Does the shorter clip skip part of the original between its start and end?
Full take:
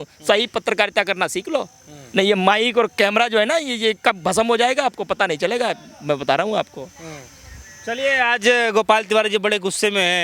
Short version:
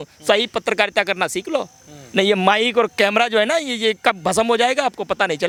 no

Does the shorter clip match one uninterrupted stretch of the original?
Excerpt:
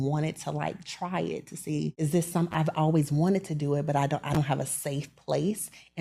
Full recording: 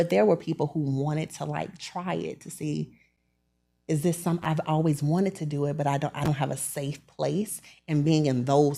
no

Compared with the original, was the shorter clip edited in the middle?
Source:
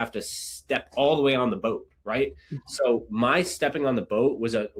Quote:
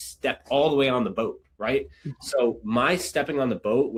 no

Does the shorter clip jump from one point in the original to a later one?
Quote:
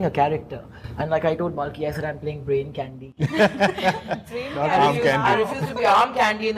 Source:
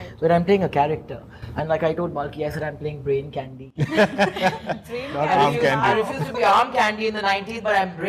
no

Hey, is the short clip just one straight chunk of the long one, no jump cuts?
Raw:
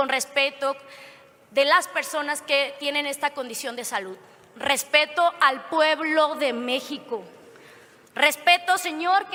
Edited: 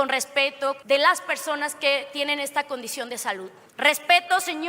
no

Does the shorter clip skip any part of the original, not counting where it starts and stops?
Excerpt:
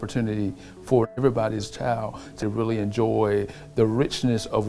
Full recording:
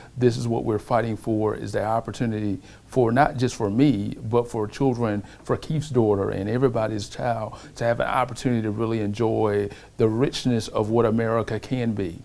yes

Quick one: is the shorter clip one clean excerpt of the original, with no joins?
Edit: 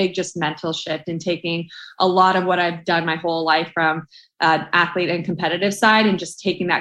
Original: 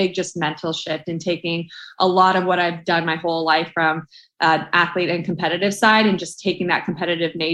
yes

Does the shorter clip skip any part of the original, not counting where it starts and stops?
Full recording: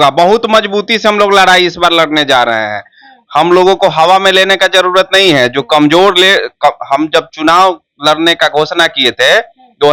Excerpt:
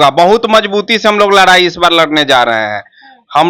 no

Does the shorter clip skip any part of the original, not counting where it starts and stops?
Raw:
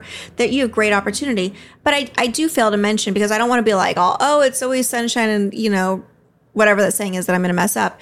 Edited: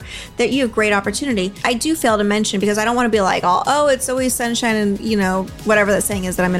yes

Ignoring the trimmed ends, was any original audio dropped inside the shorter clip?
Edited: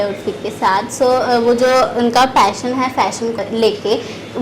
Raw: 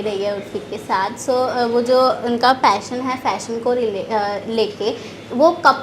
yes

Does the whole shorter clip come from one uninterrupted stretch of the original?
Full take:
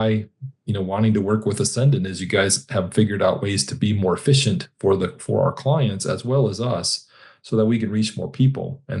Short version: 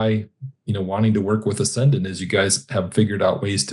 yes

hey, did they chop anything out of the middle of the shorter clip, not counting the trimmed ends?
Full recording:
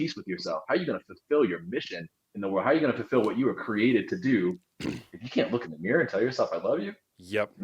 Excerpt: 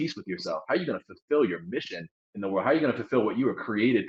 no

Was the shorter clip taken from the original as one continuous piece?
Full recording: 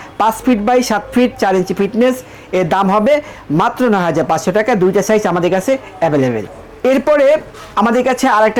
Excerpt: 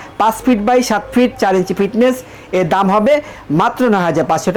yes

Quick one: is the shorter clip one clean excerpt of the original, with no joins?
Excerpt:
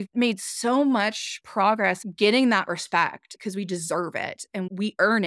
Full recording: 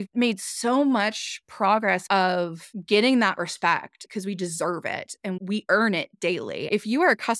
no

